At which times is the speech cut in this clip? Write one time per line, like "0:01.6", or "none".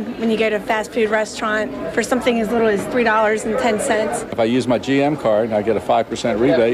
0:04.2